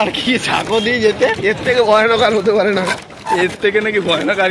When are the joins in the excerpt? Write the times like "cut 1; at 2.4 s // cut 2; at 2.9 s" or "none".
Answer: none